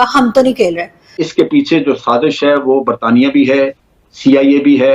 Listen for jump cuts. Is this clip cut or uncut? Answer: cut